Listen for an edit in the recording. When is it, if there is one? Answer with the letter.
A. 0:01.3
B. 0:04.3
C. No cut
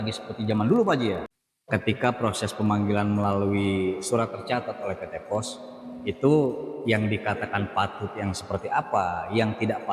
A